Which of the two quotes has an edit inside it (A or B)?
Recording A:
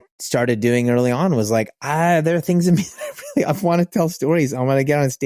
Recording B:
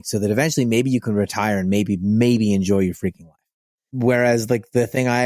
B